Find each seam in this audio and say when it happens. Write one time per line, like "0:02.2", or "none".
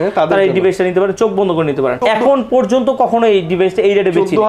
0:02.0